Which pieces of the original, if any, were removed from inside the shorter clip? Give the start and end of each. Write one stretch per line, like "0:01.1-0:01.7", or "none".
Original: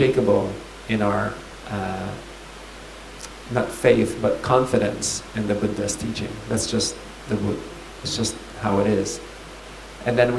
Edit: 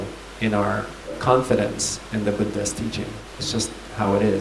0:01.6-0:04.4
0:06.4-0:07.8